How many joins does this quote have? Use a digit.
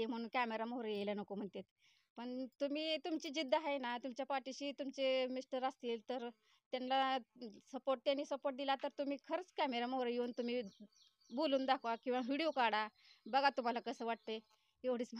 0